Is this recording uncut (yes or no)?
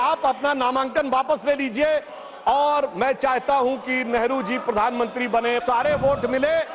no